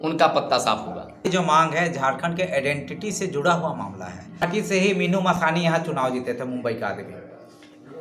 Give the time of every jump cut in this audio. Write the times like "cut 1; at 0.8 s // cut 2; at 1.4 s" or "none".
cut 1; at 1.3 s // cut 2; at 4.5 s